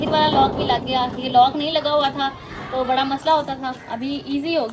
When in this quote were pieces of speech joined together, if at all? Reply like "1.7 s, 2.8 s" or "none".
none